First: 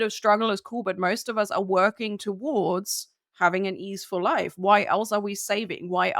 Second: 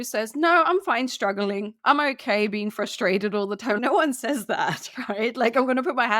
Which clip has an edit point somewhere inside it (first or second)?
second